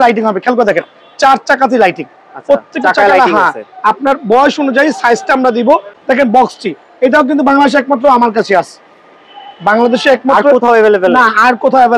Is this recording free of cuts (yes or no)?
no